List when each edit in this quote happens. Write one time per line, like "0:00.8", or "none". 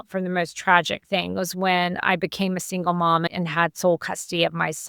0:01.3